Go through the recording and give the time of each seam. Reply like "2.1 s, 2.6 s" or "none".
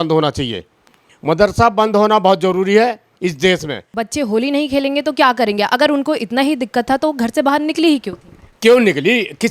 3.8 s